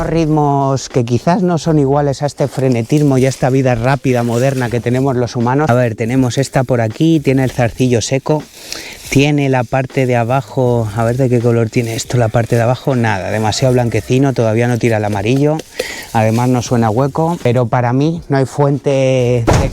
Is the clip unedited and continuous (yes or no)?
no